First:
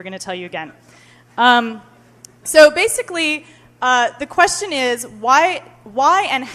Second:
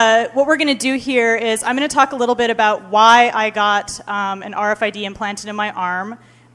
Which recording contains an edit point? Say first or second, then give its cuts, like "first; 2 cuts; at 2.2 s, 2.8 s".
second; 1 cut; at 1.3 s